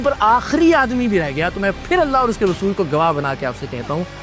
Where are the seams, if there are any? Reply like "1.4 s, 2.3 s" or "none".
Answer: none